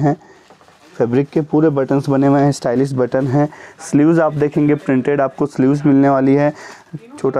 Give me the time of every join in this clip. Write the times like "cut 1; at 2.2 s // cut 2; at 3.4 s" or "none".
none